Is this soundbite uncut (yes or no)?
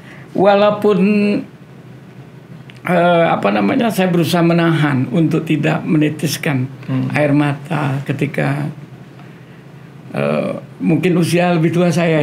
yes